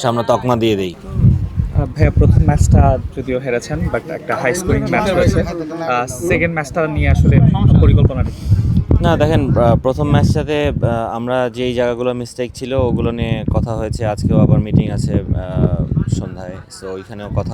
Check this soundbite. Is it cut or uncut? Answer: cut